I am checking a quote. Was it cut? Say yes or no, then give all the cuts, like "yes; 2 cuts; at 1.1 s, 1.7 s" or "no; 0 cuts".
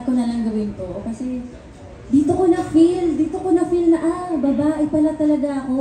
no; 0 cuts